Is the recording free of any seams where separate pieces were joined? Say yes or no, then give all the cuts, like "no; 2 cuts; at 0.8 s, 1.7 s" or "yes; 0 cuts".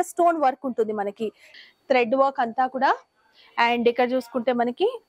no; 1 cut; at 1.5 s